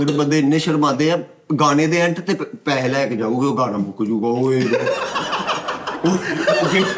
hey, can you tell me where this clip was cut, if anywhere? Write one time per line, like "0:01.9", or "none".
none